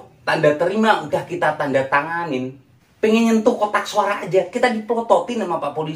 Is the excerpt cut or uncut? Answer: uncut